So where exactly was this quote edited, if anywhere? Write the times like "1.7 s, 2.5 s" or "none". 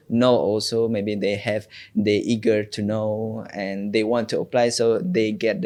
none